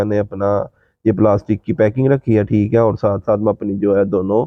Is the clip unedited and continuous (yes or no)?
yes